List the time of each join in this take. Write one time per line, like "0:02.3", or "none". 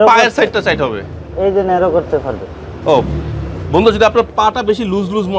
none